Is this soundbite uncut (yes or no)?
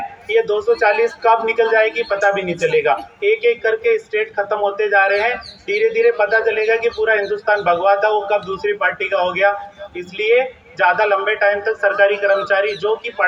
yes